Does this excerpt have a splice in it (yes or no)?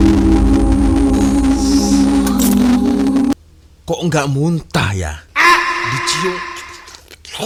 no